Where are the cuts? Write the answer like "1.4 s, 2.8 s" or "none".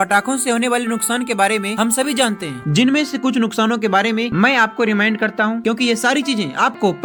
none